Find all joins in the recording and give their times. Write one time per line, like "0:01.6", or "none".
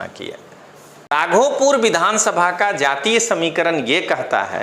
0:01.1